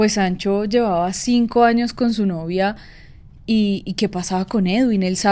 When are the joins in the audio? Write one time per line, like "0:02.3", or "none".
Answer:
none